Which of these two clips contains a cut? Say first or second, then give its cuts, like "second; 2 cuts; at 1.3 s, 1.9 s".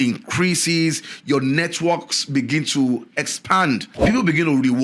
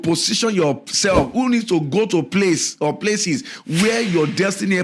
first; 1 cut; at 3.9 s